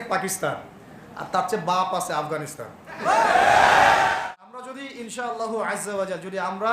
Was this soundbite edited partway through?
yes; 1 cut; at 4.2 s

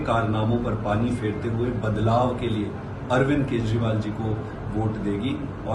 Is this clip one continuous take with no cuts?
yes; 0 cuts

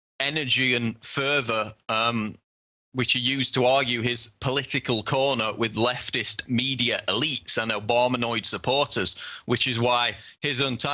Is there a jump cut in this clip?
yes; 1 cut; at 4.0 s

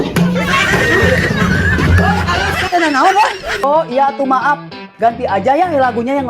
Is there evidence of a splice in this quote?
yes; 1 cut; at 3.6 s

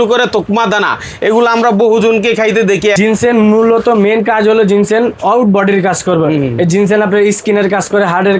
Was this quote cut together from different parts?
yes; 1 cut; at 3.0 s

